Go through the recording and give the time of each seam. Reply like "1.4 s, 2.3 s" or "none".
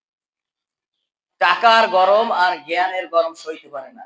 none